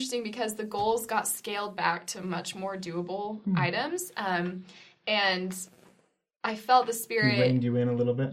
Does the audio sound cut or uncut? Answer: uncut